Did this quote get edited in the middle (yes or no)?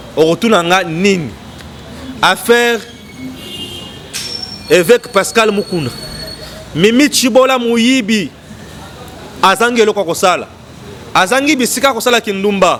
no